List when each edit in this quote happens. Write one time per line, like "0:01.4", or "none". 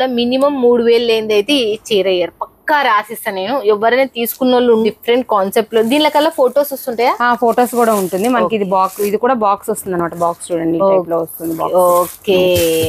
0:04.8